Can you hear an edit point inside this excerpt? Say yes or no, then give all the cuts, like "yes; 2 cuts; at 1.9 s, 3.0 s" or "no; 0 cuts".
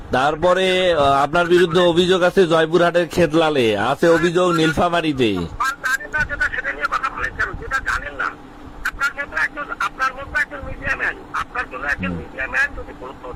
no; 0 cuts